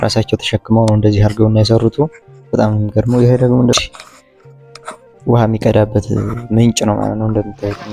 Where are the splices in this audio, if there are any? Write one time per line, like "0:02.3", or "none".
0:03.7